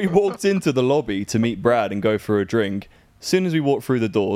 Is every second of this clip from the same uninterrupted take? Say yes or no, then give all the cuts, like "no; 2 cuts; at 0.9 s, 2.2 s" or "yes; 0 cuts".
yes; 0 cuts